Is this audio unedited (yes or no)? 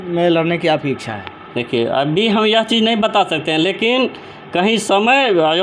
yes